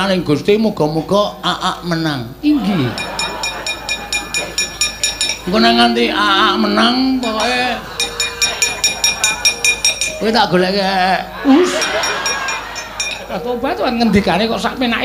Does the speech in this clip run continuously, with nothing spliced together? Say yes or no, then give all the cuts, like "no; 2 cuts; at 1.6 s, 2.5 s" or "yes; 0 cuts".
yes; 0 cuts